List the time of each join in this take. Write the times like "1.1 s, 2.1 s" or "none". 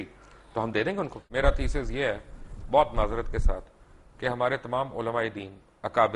1.2 s